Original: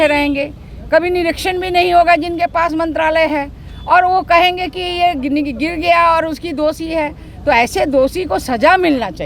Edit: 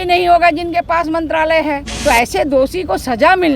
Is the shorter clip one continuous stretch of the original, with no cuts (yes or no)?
no